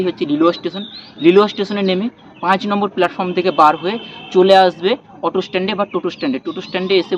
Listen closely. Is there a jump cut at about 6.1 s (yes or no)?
no